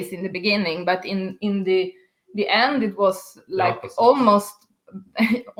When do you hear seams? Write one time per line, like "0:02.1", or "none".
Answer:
none

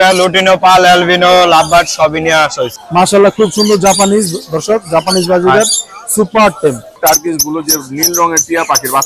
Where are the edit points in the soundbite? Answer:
0:02.7
0:06.9

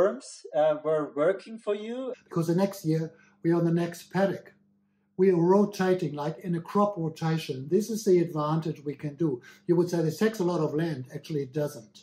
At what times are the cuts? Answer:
0:02.1

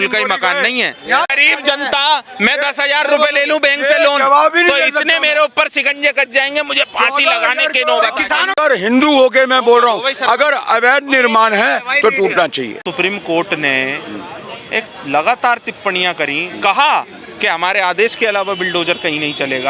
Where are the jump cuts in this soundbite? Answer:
0:01.3
0:08.6
0:12.8

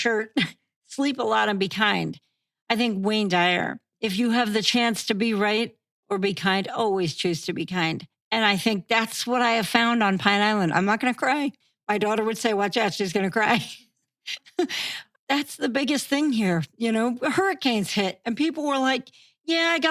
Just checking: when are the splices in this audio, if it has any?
0:03.9

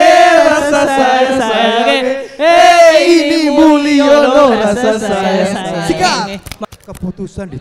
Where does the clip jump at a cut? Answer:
0:06.5

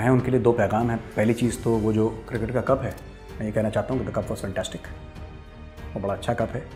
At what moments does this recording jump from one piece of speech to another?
none

